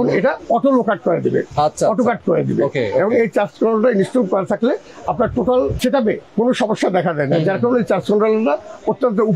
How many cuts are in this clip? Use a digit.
0